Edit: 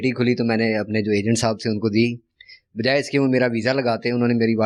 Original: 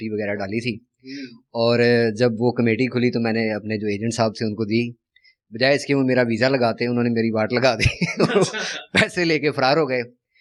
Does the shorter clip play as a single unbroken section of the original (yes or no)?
yes